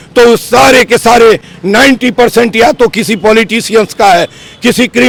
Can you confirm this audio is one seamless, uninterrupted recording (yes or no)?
yes